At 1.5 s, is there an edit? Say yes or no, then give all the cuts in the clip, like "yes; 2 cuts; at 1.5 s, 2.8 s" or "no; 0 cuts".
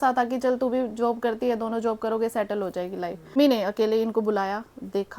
no; 1 cut; at 3.4 s